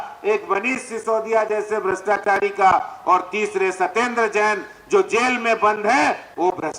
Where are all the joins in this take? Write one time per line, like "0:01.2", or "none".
none